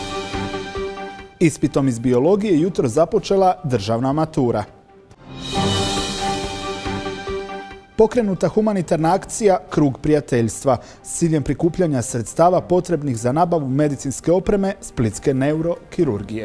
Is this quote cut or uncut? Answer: cut